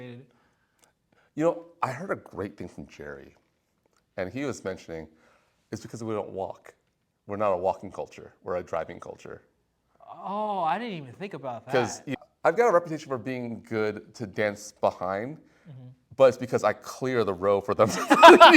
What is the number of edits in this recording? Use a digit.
1